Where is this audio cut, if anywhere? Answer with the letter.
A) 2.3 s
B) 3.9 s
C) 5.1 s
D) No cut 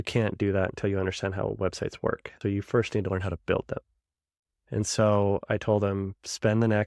A